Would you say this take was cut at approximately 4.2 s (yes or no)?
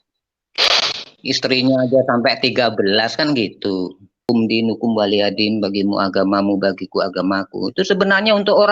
yes